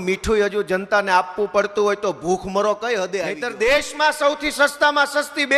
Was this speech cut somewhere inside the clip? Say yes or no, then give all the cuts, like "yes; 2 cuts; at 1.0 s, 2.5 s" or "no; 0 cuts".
yes; 1 cut; at 3.4 s